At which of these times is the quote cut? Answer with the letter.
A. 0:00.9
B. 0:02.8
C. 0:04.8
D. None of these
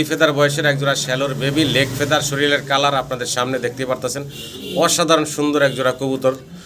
D